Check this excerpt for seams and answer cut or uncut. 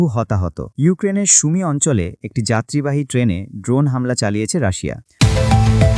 cut